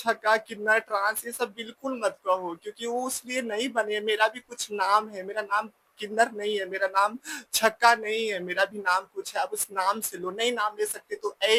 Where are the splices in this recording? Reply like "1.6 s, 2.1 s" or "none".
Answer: none